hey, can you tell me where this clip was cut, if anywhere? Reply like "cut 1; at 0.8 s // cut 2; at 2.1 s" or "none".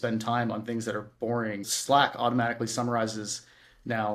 cut 1; at 1.6 s